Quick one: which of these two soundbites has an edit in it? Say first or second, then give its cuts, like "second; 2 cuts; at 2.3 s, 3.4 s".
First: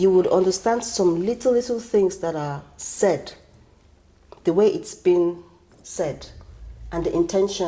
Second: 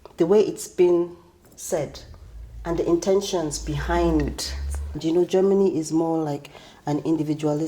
second; 1 cut; at 5.0 s